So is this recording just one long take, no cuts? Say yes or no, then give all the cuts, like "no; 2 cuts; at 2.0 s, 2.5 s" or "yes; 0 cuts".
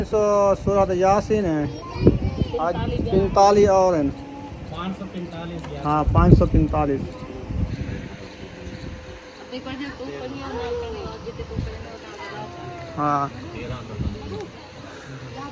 yes; 0 cuts